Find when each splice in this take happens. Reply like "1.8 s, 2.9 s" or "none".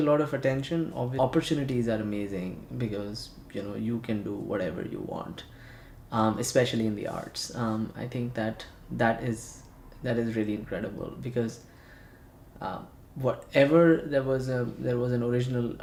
none